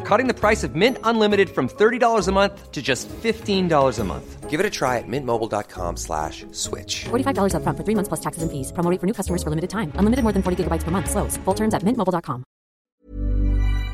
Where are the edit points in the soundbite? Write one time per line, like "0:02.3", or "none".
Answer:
0:12.9